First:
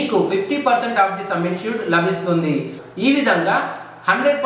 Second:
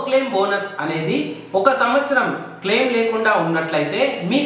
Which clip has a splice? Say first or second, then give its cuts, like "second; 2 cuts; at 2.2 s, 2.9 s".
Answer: first; 1 cut; at 2.8 s